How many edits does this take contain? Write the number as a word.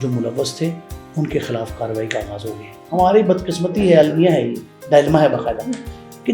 one